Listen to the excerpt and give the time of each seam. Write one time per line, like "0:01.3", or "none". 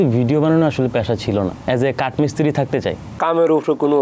0:01.6
0:03.2